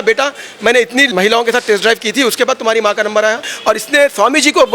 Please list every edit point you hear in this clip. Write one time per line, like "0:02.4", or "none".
0:01.1
0:03.5